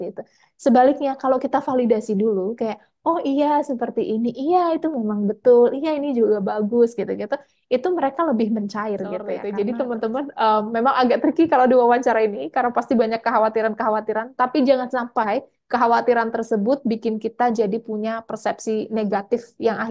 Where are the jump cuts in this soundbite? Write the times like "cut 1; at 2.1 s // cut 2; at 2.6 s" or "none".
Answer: cut 1; at 9.4 s